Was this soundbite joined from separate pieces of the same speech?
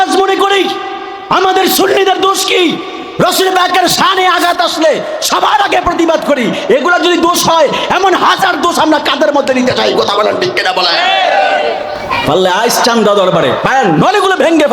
yes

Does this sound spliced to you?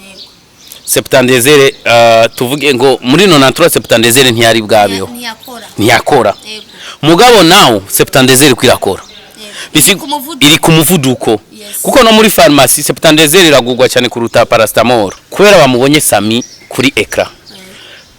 yes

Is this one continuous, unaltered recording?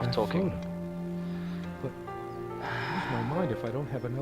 no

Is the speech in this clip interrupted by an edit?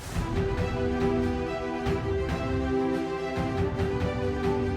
no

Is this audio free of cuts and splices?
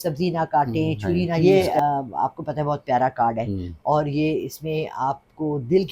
no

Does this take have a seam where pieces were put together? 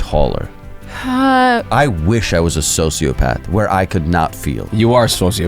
yes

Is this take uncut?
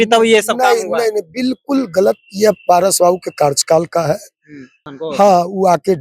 no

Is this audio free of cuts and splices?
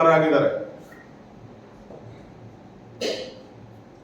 yes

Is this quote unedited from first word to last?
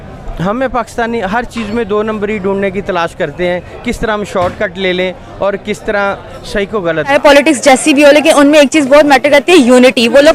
no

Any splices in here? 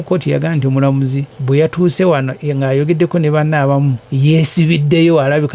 yes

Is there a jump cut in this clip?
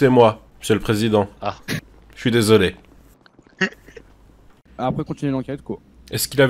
yes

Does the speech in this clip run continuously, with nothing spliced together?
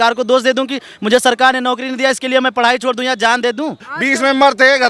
no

